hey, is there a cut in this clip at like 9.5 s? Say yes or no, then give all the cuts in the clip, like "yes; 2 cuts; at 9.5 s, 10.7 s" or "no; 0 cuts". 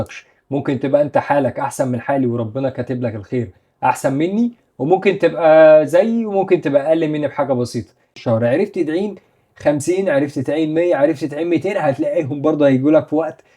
no; 1 cut; at 8.1 s